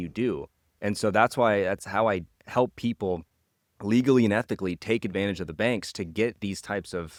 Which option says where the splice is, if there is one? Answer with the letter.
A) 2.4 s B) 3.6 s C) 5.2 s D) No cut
D